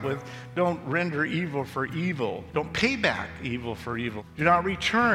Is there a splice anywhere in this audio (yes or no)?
yes